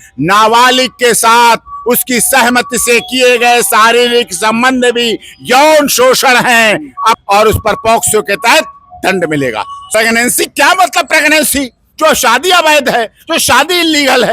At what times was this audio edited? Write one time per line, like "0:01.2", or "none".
0:07.2
0:09.8